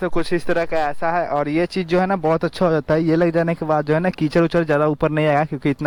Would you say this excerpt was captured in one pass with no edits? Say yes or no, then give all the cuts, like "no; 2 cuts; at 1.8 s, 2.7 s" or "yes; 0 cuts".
yes; 0 cuts